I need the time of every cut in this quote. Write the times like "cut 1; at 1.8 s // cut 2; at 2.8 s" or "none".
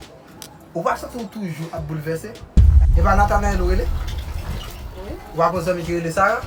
none